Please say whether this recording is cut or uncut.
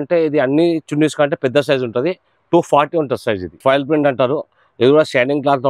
cut